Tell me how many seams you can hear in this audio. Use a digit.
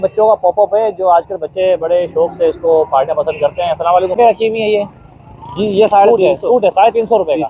1